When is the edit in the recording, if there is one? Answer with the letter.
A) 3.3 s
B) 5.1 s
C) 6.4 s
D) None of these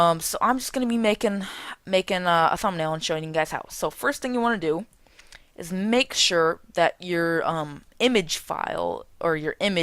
B